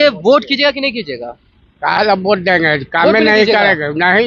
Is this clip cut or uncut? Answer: uncut